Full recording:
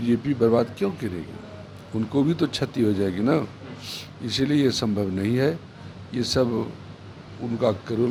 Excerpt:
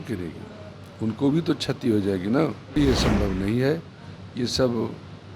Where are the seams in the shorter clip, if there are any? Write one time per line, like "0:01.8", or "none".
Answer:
0:02.7